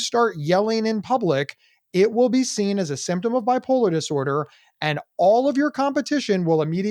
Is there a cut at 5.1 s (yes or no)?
no